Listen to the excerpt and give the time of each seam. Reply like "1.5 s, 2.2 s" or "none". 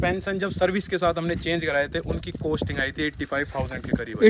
none